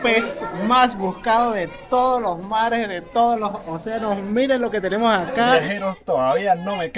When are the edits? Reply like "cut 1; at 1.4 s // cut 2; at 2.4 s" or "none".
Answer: cut 1; at 5.5 s